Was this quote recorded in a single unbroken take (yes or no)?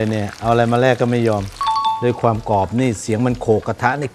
no